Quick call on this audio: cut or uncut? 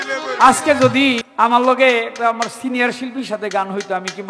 cut